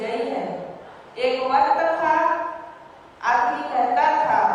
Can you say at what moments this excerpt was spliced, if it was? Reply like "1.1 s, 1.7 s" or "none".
none